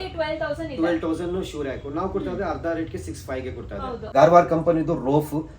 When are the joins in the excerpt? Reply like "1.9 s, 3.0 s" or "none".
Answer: 4.0 s